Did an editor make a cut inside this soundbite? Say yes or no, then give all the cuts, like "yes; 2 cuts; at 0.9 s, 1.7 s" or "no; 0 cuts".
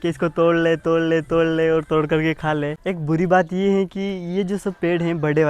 yes; 1 cut; at 2.8 s